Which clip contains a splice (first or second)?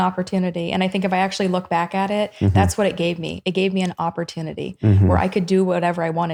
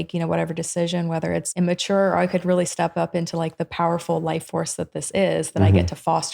second